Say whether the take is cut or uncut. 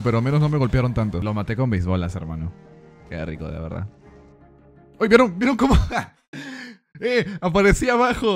cut